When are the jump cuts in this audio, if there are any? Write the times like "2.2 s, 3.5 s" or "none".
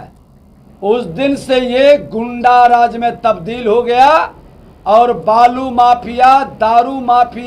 none